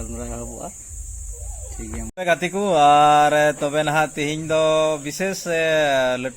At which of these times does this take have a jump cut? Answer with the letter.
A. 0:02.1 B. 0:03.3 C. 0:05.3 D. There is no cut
A